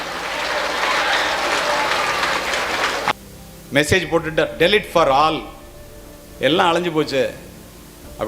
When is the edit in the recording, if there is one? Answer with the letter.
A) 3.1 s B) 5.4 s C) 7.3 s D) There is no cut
A